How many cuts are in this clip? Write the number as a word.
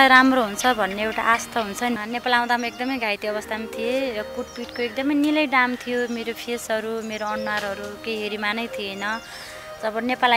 one